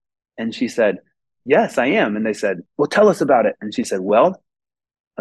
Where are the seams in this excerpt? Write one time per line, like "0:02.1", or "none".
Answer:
0:02.7

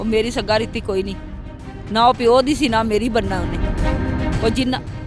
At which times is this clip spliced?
none

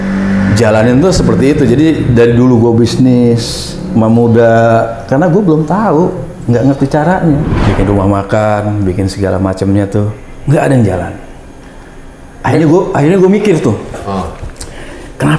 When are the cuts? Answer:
0:07.6

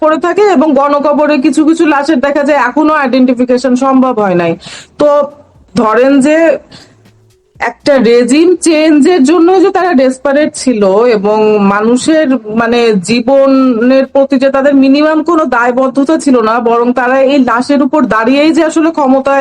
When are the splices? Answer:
0:05.7

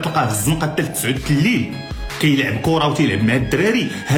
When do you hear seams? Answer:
none

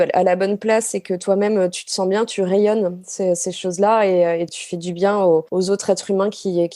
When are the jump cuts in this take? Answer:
0:04.6
0:05.5

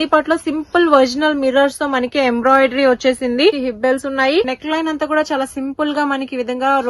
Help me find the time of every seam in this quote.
0:03.6
0:04.5

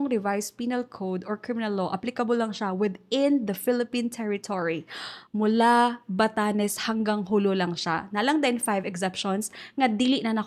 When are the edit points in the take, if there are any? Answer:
none

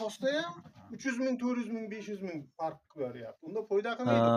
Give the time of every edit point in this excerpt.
none

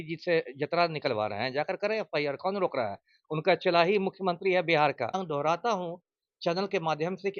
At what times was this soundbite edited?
0:05.2

